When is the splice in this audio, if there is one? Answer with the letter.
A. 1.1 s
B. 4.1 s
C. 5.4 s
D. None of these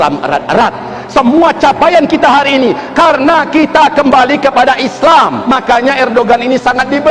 C